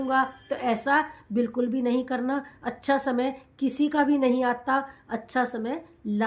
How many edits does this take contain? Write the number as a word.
zero